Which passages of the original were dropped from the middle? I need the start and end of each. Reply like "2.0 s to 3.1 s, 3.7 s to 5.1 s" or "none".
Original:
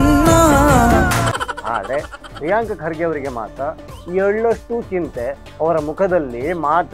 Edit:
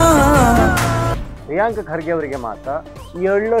1.6 s to 2.1 s